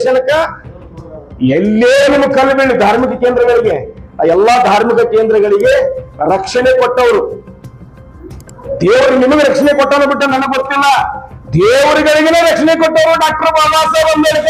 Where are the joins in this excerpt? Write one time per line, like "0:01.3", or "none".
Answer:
none